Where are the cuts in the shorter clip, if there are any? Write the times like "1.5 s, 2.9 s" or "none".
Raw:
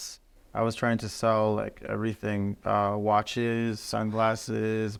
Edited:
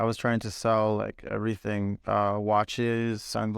none